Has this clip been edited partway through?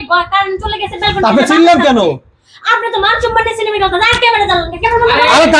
no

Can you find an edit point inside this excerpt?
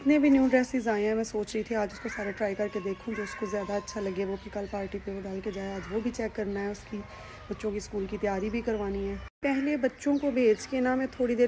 yes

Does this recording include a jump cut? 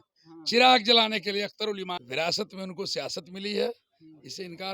yes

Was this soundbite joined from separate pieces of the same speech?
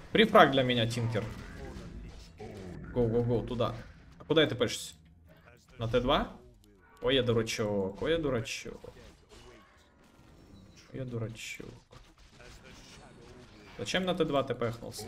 no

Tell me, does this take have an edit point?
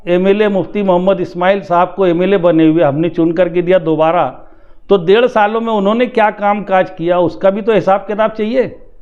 no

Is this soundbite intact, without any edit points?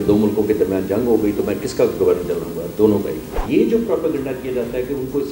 no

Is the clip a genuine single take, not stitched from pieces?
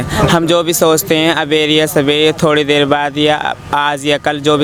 yes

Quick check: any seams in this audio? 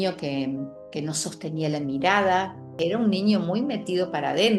yes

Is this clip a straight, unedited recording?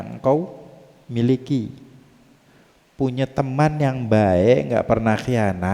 yes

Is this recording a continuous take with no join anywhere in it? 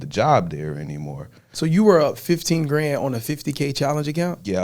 no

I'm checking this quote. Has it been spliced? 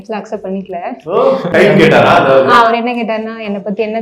yes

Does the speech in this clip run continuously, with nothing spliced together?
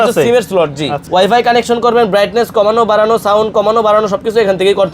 no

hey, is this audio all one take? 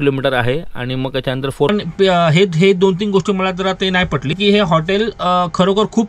no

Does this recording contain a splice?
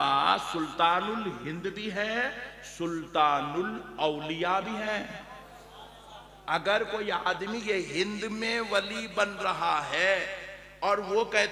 no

